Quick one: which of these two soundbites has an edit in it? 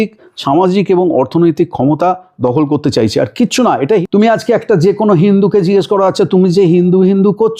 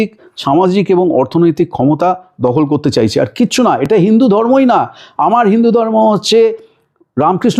first; 1 cut; at 3.9 s

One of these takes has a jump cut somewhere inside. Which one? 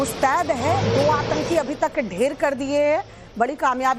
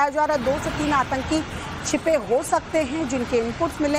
first; 1 cut; at 2.4 s

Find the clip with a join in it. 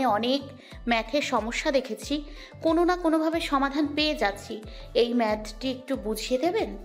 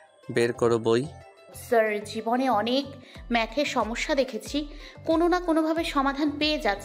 second; 1 cut; at 1.5 s

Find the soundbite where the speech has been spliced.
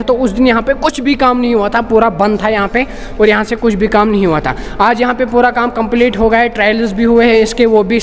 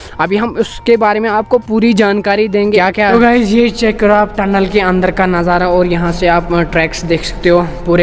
second; 1 cut; at 3.1 s

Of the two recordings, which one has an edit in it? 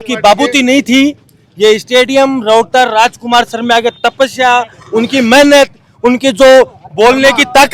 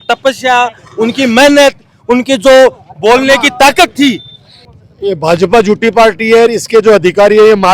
second; 1 cut; at 4.8 s

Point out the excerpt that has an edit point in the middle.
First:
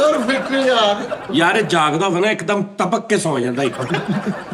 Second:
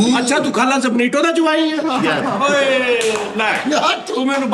first; 1 cut; at 1.3 s

